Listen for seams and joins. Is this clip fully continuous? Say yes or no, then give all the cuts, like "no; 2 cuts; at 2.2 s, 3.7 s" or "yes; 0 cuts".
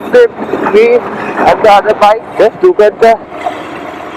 no; 1 cut; at 2.3 s